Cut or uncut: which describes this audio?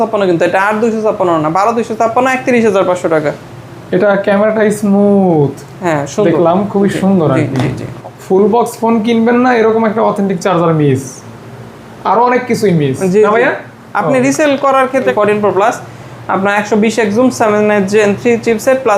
cut